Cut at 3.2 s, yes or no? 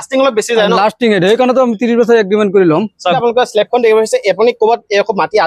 yes